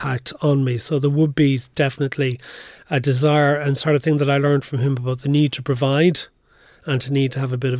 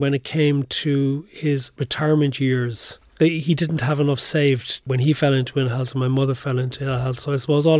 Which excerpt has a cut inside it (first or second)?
second